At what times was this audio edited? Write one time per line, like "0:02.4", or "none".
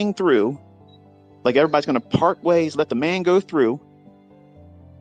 0:02.7

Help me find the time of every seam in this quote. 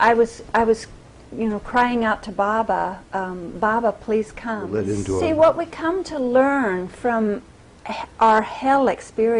0:04.7

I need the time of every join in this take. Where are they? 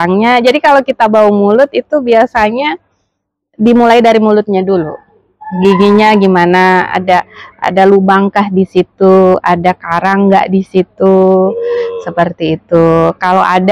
none

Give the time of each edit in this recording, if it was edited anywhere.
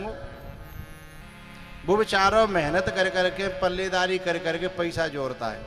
0:01.2

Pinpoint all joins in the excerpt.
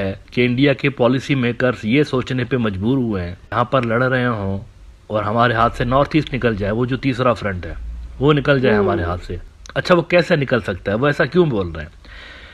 0:03.5

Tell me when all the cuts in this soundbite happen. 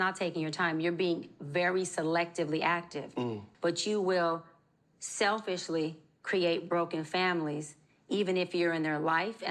0:03.4

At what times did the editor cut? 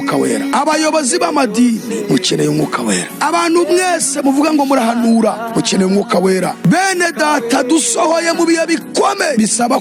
none

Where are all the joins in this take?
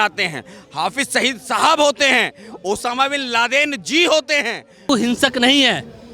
0:04.9

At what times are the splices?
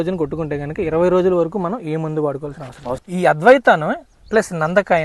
0:03.0

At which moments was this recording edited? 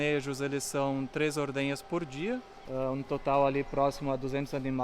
0:02.6

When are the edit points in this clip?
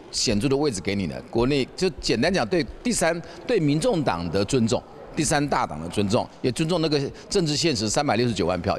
none

